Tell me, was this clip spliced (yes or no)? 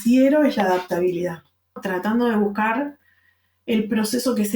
yes